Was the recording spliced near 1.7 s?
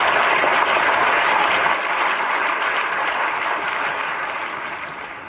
yes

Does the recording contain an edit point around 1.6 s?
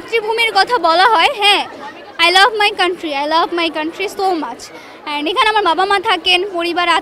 no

